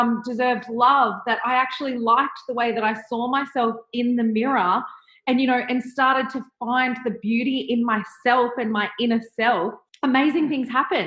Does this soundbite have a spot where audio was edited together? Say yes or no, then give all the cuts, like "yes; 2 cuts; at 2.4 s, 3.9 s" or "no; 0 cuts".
yes; 1 cut; at 9.8 s